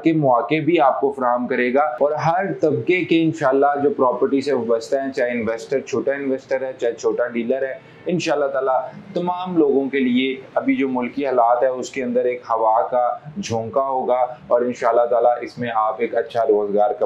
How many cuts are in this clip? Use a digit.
0